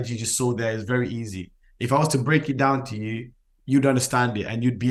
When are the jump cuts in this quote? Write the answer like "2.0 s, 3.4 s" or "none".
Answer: none